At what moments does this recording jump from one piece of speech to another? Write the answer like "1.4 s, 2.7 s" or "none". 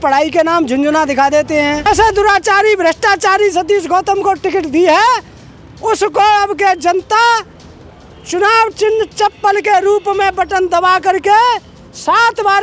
1.9 s